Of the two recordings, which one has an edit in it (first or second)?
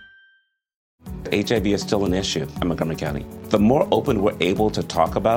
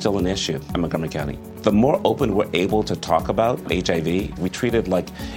first